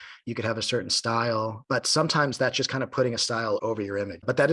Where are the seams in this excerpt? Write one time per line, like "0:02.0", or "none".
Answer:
0:01.6
0:03.6